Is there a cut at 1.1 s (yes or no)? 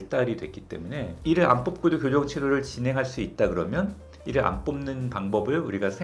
yes